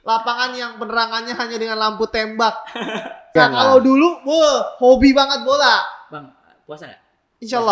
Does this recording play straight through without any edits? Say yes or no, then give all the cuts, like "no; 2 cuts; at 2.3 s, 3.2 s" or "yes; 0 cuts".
no; 1 cut; at 3.3 s